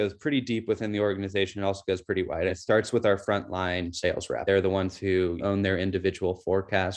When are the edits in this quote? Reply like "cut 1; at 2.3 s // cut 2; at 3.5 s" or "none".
cut 1; at 2.5 s // cut 2; at 4.4 s // cut 3; at 5.4 s